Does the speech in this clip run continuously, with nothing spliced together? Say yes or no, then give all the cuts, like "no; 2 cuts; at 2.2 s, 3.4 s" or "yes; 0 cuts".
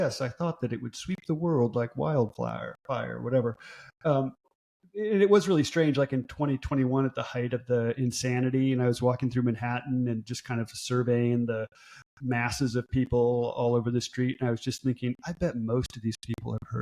no; 1 cut; at 4.4 s